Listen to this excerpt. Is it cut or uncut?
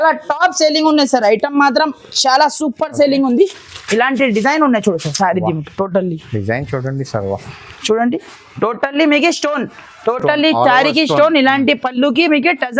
uncut